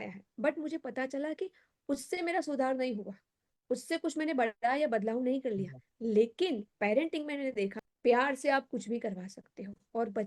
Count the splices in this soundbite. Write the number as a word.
one